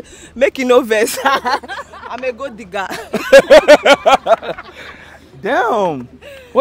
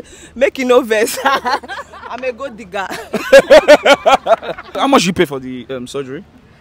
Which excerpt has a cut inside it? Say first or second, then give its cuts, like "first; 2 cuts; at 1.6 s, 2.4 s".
second; 1 cut; at 4.8 s